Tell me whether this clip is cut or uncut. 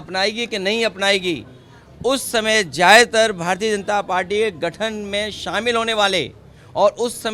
uncut